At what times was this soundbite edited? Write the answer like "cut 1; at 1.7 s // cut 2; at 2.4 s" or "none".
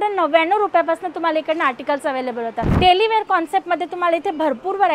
cut 1; at 2.6 s